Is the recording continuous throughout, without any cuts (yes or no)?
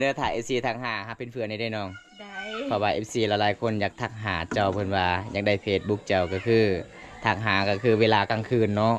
yes